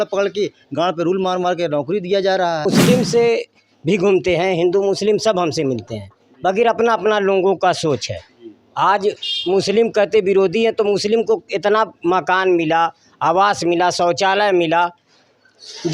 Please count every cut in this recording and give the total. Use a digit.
1